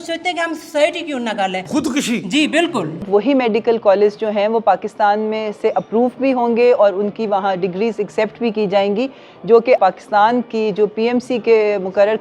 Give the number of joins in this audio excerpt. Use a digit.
3